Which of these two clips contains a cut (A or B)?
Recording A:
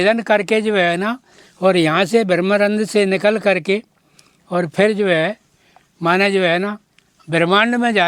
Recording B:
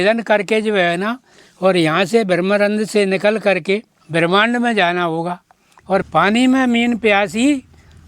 B